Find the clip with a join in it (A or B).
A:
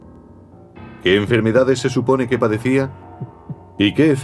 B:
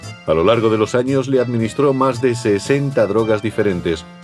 B